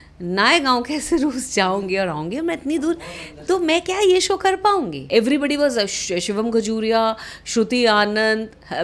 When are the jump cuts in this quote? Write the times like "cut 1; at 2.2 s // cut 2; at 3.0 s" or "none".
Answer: cut 1; at 5.0 s